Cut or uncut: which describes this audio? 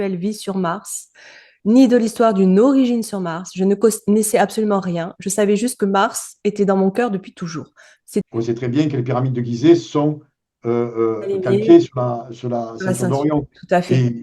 cut